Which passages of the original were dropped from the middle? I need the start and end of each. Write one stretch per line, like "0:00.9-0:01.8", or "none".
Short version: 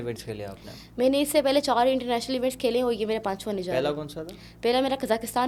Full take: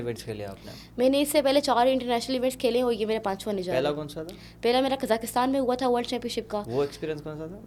none